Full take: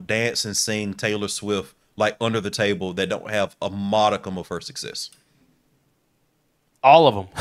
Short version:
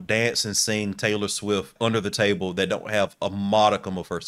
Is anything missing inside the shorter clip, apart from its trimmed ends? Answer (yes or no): yes